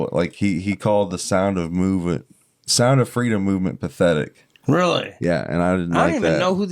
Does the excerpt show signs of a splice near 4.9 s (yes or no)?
yes